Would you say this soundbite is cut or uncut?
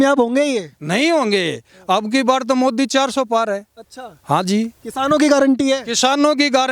uncut